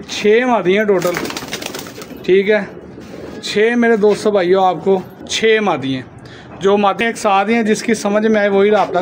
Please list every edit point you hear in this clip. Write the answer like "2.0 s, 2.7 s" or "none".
5.2 s, 7.0 s